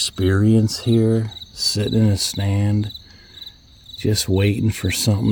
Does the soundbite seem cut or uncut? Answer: uncut